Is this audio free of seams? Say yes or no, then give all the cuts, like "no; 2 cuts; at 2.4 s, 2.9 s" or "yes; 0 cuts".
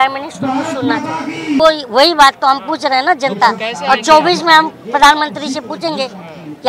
no; 1 cut; at 1.6 s